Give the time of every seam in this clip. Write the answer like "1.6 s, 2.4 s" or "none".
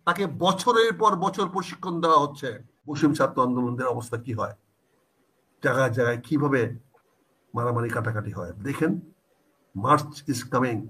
3.0 s